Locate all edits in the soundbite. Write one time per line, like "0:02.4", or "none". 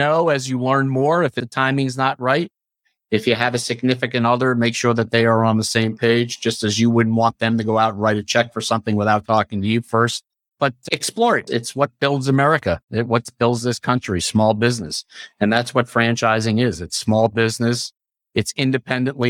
0:01.4
0:10.5